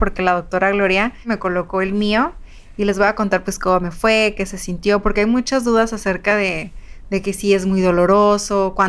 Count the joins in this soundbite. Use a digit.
1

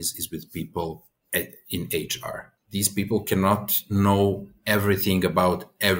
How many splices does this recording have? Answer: 2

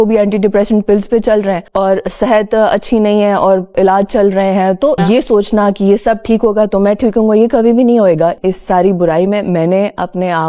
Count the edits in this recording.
2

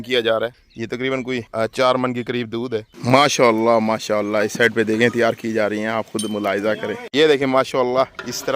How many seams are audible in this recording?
3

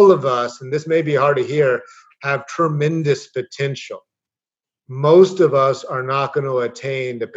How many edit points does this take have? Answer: 0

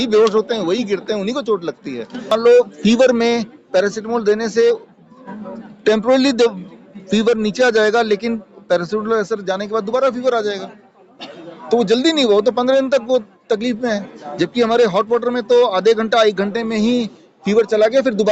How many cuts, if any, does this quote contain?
1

